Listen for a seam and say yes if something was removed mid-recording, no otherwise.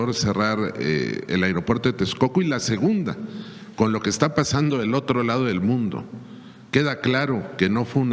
no